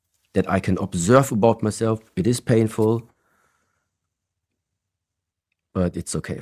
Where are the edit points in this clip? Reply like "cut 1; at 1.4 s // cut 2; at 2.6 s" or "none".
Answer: none